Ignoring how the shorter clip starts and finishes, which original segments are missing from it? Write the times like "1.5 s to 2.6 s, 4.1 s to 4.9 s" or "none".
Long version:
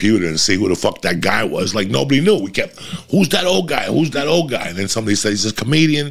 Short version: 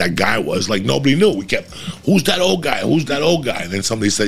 none